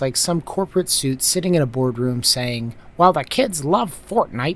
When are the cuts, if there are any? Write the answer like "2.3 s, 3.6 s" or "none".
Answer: none